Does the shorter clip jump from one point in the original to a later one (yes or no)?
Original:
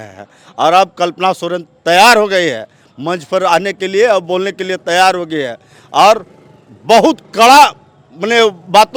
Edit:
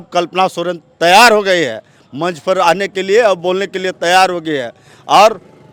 no